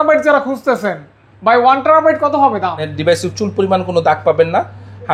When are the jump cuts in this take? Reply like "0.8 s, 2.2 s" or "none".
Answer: 2.9 s